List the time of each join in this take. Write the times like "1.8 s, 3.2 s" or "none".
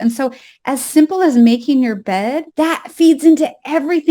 2.4 s